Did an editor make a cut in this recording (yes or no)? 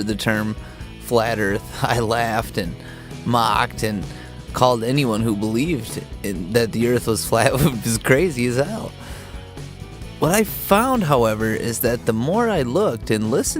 yes